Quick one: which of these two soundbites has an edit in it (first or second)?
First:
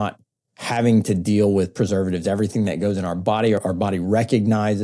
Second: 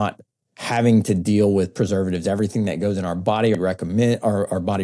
first